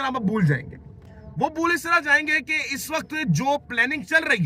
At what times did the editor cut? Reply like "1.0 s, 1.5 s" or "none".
none